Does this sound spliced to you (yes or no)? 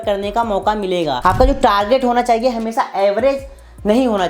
yes